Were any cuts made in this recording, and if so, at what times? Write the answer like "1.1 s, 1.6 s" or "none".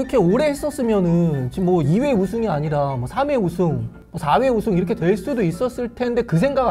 none